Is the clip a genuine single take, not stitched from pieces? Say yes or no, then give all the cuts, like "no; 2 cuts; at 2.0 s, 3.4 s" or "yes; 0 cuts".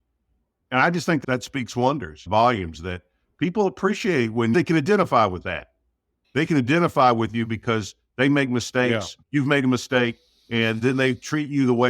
no; 2 cuts; at 4.5 s, 9.1 s